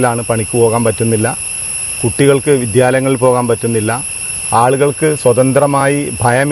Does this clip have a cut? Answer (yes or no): no